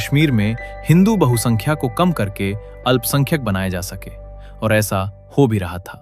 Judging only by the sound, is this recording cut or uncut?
uncut